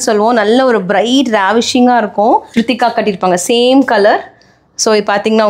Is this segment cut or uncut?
cut